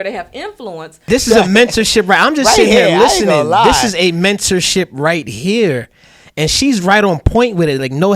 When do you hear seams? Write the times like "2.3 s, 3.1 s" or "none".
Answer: 1.0 s